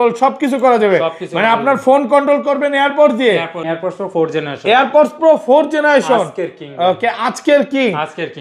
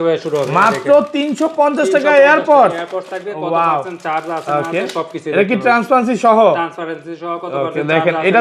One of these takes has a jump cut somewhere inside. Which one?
first; 1 cut; at 3.6 s

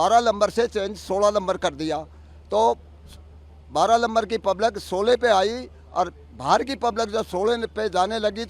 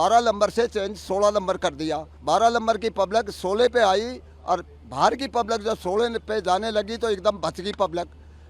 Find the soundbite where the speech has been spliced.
second; 1 cut; at 2.1 s

